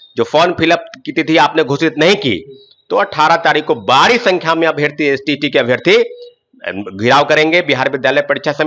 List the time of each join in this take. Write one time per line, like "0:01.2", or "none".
none